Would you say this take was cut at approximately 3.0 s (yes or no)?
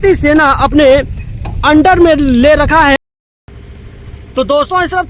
yes